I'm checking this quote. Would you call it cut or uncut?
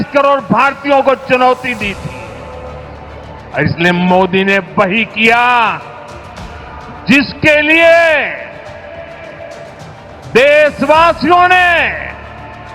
uncut